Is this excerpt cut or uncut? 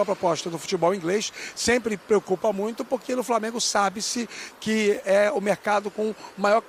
uncut